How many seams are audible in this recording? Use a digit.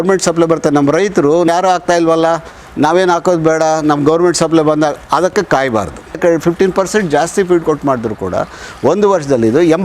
2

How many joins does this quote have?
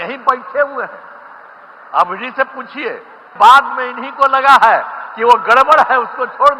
1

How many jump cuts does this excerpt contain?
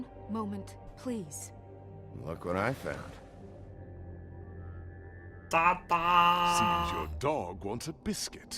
1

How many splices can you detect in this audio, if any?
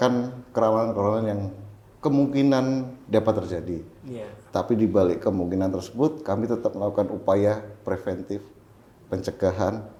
0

